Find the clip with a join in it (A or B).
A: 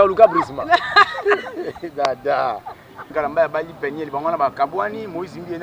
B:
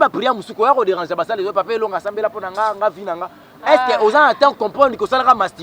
A